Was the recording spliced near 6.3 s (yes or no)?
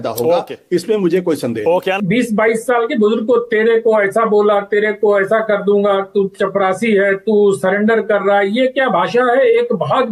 no